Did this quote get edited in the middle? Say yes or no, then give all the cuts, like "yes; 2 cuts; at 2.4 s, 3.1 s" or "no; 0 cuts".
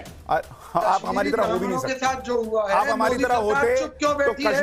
no; 0 cuts